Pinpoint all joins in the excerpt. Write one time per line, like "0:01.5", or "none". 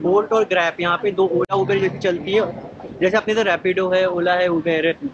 none